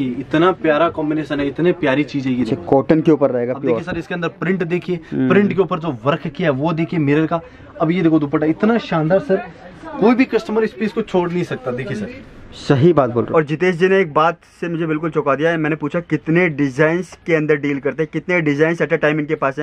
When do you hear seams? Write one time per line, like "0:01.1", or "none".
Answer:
0:13.3